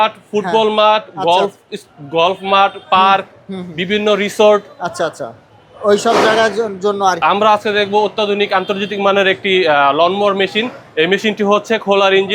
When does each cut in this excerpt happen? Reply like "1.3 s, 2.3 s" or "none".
none